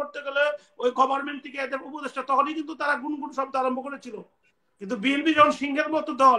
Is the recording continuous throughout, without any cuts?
yes; 0 cuts

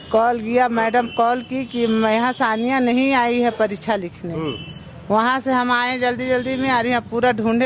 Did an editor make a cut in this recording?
no; 0 cuts

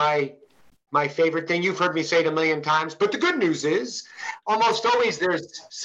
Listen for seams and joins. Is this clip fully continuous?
no; 1 cut; at 4.3 s

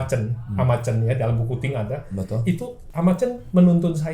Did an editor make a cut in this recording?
yes; 1 cut; at 2.8 s

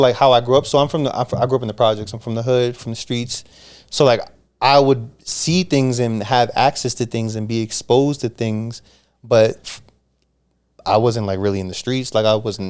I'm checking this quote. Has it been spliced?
no; 0 cuts

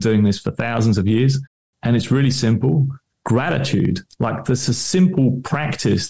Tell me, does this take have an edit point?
no; 0 cuts

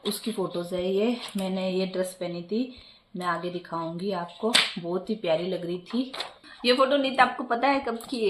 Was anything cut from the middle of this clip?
no; 0 cuts

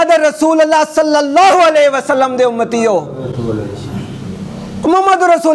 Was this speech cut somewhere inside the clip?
no; 0 cuts

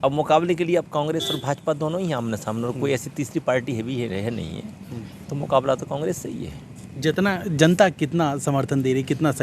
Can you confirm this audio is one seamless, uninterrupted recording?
yes; 0 cuts

